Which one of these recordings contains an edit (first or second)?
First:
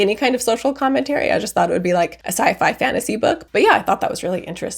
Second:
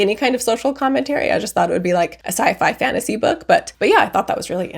first